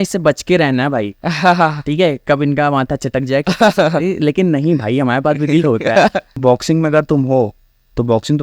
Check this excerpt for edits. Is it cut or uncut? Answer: cut